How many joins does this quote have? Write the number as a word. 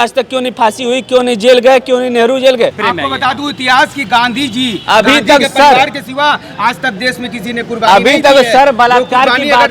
one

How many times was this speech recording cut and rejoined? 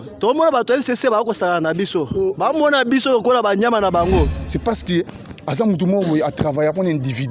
one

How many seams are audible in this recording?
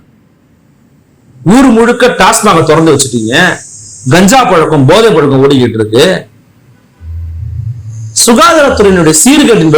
zero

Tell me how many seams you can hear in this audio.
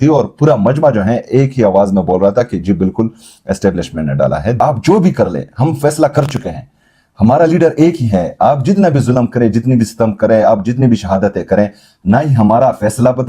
one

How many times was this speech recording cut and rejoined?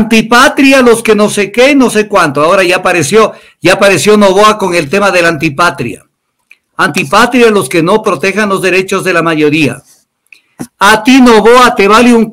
zero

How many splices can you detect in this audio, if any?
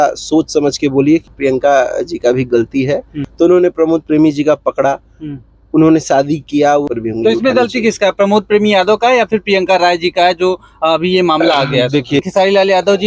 four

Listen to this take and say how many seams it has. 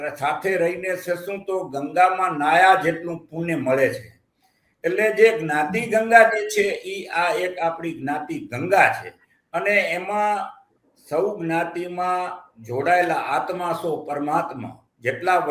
zero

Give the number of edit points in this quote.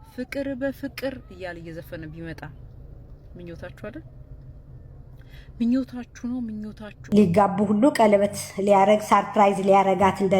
one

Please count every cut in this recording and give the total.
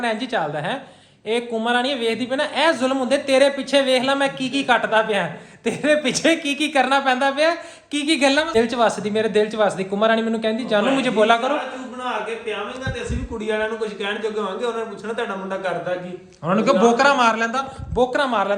one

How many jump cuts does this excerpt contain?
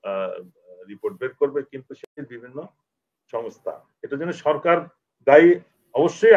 one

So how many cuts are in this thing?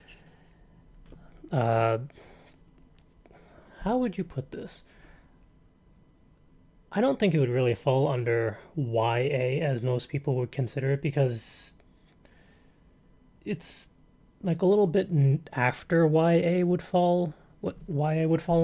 one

